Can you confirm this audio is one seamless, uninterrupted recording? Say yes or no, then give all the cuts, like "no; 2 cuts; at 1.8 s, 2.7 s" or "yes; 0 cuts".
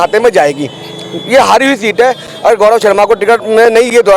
yes; 0 cuts